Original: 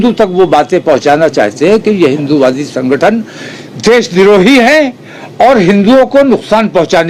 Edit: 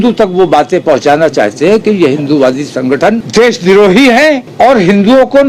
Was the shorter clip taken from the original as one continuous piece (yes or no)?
no